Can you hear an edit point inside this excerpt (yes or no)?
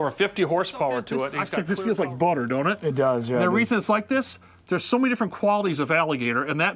yes